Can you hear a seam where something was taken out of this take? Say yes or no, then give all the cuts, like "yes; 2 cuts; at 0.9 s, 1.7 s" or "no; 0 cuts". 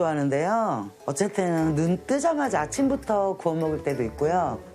no; 0 cuts